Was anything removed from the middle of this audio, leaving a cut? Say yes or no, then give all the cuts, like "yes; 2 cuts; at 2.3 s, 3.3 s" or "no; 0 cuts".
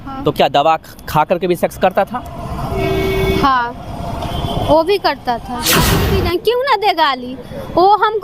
yes; 1 cut; at 5.9 s